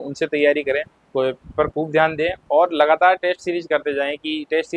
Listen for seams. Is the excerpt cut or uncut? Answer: cut